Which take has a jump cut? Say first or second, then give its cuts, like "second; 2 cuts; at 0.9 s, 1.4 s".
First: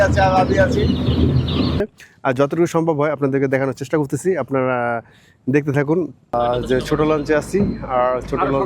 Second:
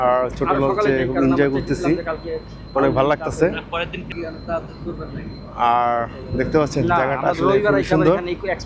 first; 2 cuts; at 1.8 s, 6.3 s